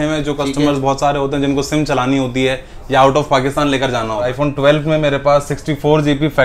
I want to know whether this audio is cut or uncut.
cut